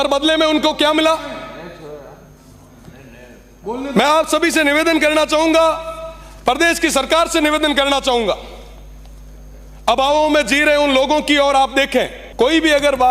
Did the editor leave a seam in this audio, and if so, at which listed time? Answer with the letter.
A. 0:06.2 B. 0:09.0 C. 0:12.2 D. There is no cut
C